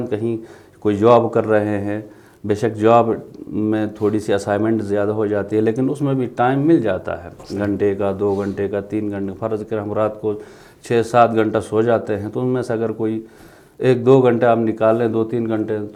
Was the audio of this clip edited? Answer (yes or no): no